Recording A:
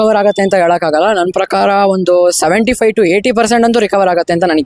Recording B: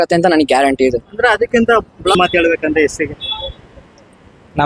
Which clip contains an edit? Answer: B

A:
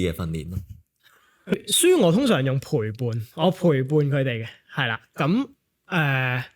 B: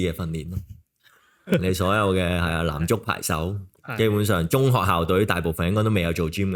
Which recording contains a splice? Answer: A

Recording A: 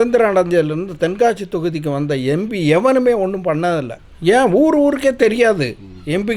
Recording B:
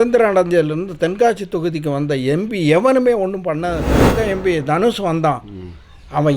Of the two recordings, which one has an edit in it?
B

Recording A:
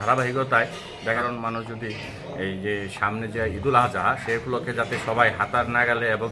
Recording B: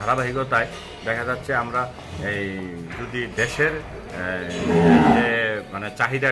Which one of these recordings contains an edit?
A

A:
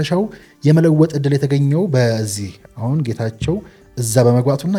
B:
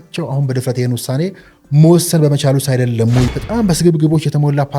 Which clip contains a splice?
B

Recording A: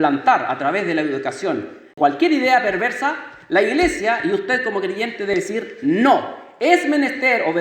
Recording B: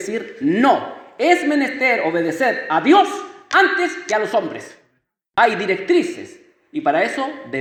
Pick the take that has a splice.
A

